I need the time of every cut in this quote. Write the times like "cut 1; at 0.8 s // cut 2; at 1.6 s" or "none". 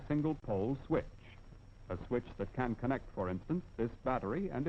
cut 1; at 1.9 s